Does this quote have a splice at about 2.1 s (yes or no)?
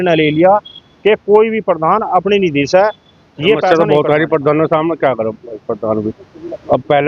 no